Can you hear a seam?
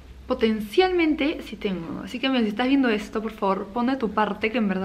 no; 0 cuts

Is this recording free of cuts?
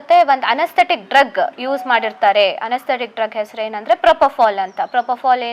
yes; 0 cuts

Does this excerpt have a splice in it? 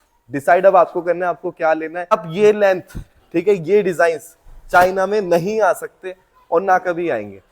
yes; 1 cut; at 2.1 s

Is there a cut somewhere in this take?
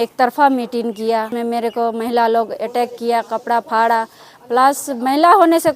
yes; 1 cut; at 1.3 s

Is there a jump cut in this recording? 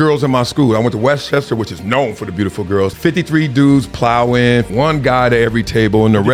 yes; 2 cuts; at 2.9 s, 4.7 s

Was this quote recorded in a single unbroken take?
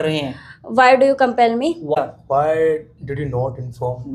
no; 1 cut; at 2.0 s

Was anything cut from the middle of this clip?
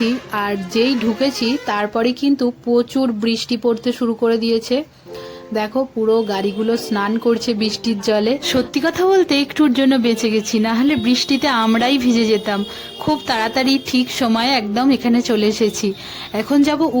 no; 0 cuts

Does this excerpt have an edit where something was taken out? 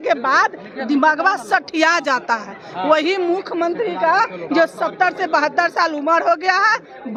no; 0 cuts

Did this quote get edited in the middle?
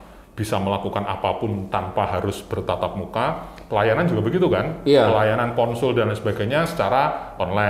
no; 0 cuts

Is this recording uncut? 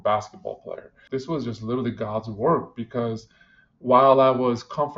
no; 1 cut; at 1.0 s

